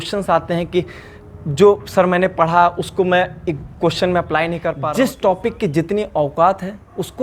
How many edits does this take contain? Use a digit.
1